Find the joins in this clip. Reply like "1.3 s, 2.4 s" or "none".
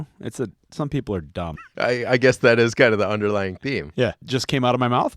1.5 s, 4.2 s